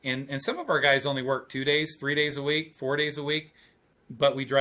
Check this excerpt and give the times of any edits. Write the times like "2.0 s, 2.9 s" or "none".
none